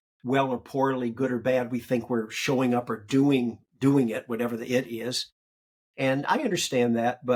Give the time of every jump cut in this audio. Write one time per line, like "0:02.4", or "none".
none